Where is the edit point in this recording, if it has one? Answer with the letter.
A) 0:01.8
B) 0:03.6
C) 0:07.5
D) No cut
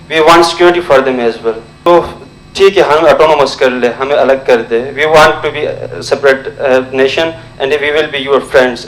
A